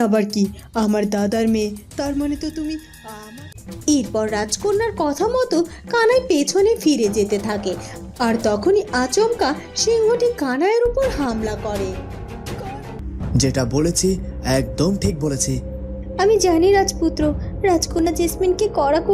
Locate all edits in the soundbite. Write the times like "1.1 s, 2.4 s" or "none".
3.2 s, 12.7 s